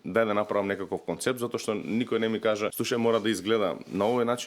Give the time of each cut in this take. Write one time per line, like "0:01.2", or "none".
0:02.8